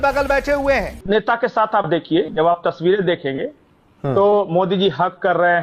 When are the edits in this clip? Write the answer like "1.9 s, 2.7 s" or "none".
0.9 s

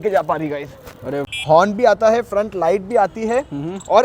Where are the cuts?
1.3 s

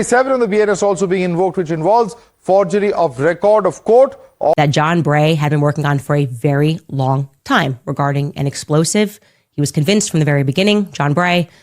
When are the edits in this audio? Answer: 4.5 s

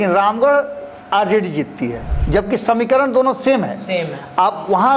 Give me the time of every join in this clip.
2.1 s

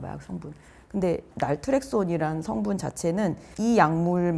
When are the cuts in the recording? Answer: 3.4 s

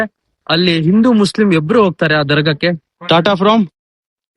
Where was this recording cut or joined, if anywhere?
2.9 s

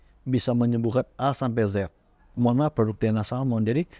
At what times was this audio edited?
2.3 s

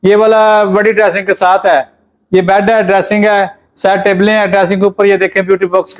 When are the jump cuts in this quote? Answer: none

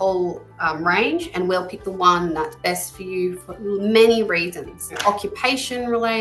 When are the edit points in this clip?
4.9 s

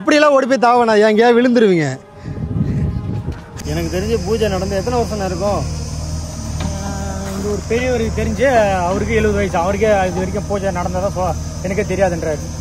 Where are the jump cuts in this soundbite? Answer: 3.5 s

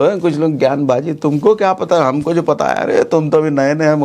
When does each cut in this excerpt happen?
none

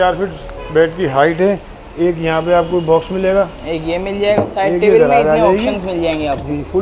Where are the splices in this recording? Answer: none

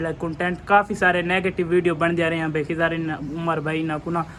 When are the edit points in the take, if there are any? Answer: none

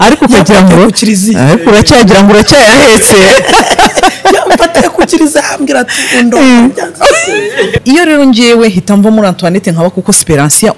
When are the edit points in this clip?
7.7 s

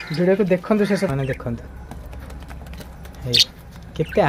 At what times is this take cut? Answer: 1.1 s

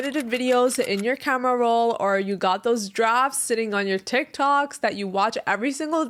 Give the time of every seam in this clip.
none

